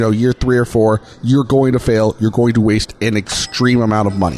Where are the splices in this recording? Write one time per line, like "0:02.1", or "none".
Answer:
0:01.1